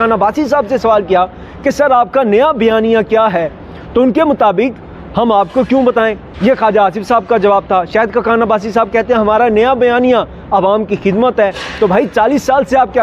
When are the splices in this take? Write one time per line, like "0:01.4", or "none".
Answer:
none